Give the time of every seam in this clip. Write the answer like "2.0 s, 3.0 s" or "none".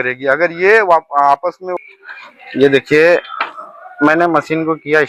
1.7 s